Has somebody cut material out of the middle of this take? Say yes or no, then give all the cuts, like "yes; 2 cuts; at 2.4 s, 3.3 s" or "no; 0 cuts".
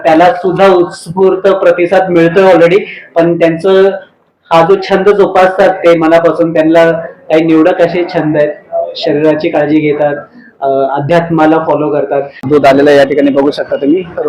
yes; 1 cut; at 12.4 s